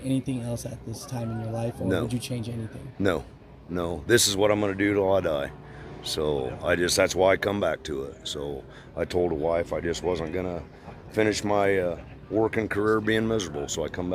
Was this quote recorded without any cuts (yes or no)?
yes